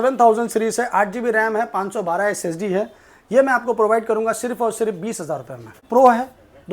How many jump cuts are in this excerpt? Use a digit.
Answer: 1